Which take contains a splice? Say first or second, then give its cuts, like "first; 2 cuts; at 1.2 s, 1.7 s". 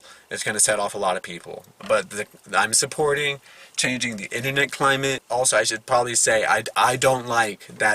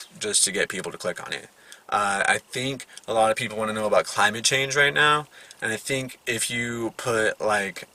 first; 1 cut; at 5.2 s